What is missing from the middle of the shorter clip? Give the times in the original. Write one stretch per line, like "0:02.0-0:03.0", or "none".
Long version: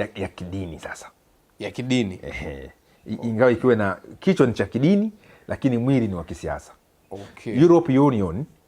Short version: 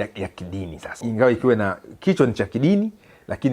0:01.0-0:03.2